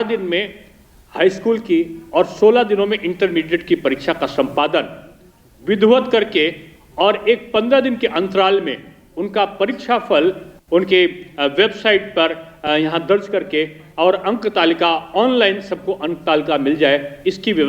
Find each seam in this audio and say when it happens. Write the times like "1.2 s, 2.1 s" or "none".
none

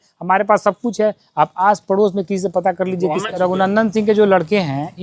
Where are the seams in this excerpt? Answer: 3.3 s

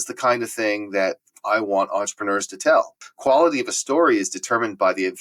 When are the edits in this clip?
3.1 s

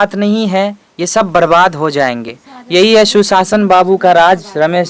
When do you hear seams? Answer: none

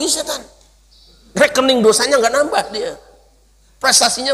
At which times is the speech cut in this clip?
none

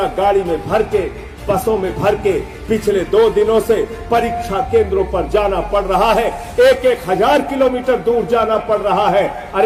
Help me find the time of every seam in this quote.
none

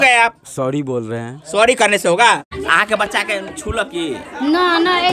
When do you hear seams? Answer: 2.6 s

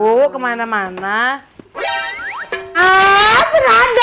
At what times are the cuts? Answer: 2.7 s

